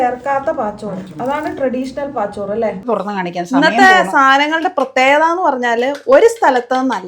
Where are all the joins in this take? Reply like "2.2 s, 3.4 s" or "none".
2.8 s